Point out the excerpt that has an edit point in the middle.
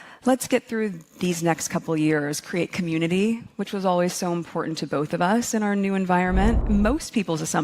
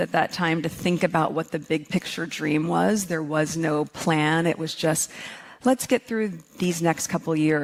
first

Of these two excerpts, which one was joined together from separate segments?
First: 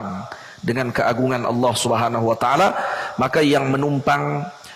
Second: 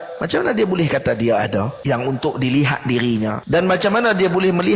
second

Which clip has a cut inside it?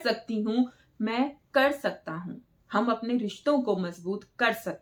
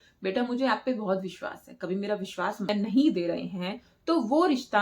second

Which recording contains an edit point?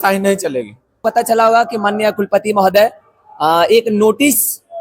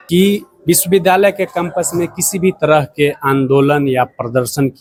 first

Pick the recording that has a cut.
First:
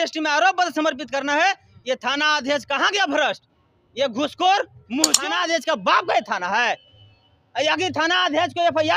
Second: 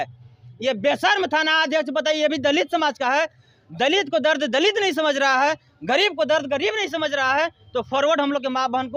first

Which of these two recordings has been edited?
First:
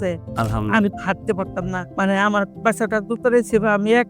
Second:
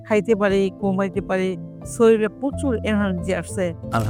first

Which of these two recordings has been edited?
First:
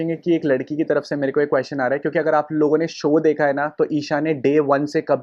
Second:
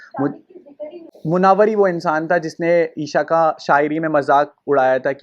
second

